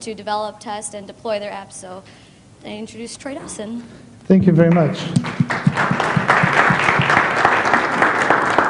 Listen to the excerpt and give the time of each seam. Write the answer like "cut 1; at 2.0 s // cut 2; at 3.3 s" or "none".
none